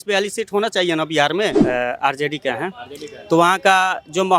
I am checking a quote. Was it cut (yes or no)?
yes